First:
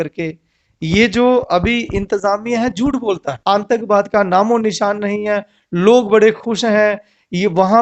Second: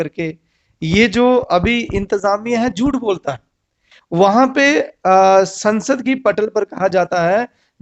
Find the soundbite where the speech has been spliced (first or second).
first